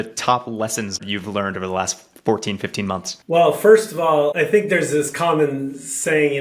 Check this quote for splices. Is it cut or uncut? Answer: cut